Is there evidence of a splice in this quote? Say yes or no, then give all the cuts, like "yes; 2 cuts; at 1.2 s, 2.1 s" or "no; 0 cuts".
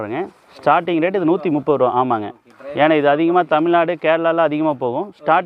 no; 0 cuts